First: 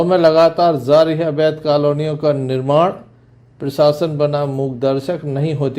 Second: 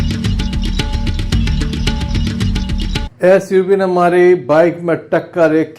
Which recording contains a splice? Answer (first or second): second